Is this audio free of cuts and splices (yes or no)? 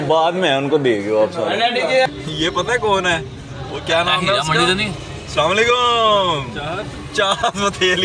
no